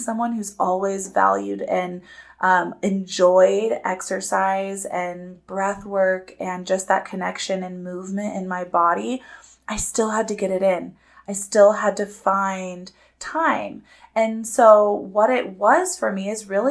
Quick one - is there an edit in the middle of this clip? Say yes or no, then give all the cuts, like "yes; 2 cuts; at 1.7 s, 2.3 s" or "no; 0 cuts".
no; 0 cuts